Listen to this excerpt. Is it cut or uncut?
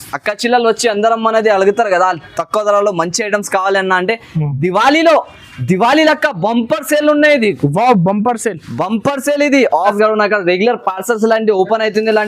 cut